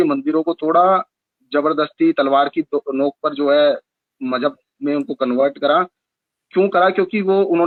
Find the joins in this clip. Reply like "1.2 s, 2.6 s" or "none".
none